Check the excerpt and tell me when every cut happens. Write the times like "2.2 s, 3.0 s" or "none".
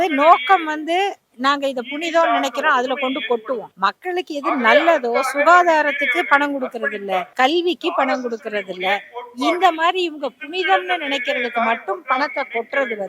3.7 s, 7.3 s

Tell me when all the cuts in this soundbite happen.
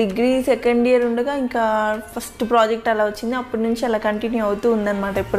none

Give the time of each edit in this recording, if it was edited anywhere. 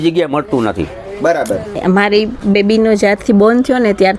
1.8 s

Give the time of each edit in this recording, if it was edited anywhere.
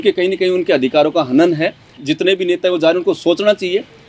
2.0 s

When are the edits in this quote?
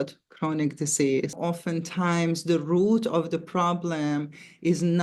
1.3 s

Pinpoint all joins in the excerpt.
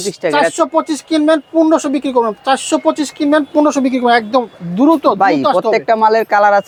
none

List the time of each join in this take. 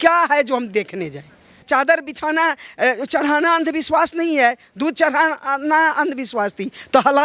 1.5 s

